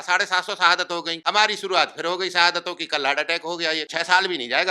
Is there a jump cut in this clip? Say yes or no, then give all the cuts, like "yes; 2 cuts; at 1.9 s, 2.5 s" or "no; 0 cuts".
yes; 2 cuts; at 1.1 s, 3.9 s